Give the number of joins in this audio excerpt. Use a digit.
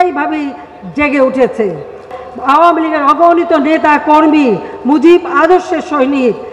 1